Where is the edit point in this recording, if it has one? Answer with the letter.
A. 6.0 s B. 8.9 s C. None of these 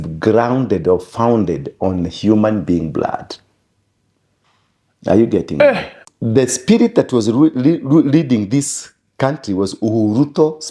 A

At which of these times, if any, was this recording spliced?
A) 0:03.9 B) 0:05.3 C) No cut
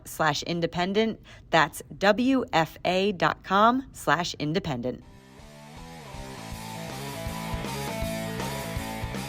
B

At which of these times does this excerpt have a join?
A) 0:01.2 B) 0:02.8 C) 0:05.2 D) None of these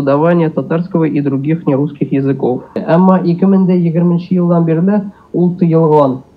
B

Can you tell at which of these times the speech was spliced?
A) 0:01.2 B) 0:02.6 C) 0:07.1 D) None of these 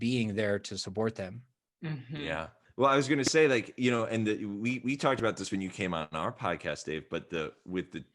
B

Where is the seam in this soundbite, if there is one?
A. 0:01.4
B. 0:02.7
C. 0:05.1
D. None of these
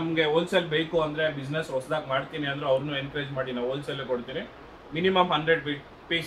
D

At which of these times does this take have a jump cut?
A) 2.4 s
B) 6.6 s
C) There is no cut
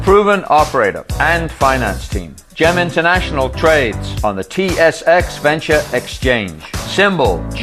C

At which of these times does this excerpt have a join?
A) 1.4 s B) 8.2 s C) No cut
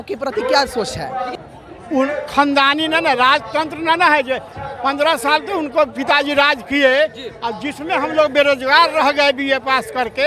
A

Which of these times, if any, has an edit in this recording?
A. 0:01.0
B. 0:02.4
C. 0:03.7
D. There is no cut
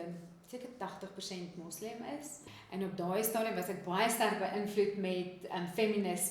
B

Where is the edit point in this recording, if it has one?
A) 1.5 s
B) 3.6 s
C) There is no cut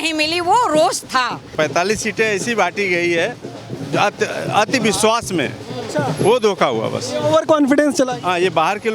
A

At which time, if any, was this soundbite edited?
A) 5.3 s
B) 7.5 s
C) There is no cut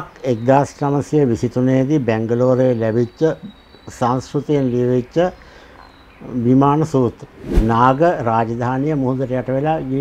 B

